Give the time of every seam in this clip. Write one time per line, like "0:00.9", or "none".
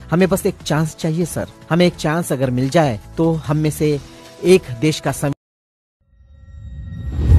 0:05.3